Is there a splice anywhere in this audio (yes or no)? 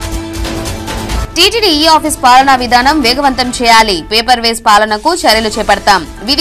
no